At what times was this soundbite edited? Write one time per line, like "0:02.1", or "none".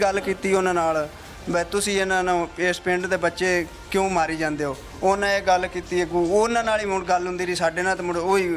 none